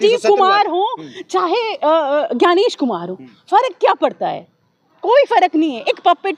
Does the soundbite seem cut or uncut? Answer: uncut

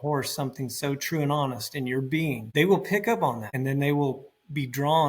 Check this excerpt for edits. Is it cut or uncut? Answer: cut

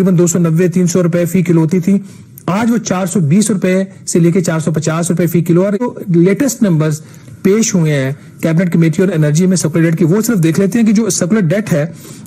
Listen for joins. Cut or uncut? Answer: cut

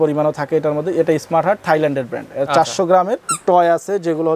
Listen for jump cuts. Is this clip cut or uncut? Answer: cut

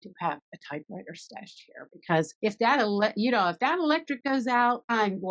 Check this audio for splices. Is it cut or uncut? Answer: uncut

